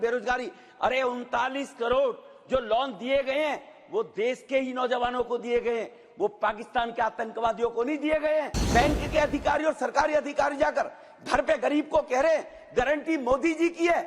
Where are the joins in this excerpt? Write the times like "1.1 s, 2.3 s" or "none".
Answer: 8.6 s